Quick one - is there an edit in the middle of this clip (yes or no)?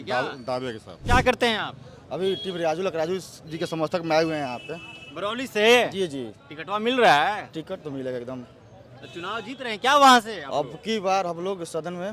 yes